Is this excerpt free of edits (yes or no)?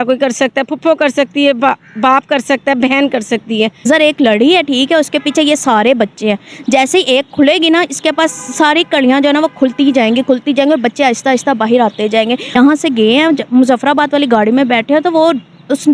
no